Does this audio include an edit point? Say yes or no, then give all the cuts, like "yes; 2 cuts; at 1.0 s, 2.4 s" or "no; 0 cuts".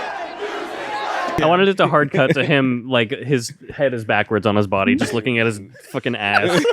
yes; 1 cut; at 1.4 s